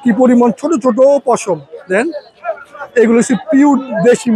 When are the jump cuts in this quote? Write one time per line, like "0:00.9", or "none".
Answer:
none